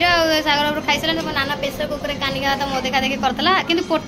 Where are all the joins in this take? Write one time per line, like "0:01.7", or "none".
none